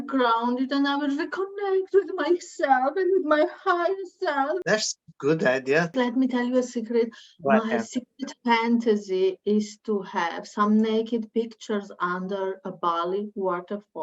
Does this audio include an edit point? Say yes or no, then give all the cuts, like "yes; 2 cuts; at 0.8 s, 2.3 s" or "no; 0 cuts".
yes; 2 cuts; at 4.6 s, 5.9 s